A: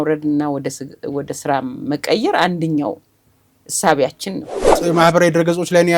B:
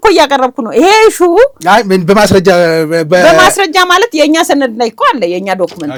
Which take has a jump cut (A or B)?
A